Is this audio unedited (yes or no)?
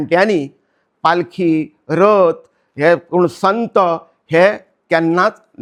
yes